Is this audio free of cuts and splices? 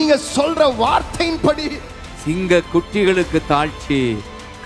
no; 1 cut; at 1.9 s

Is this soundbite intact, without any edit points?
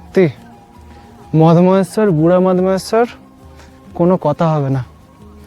yes; 0 cuts

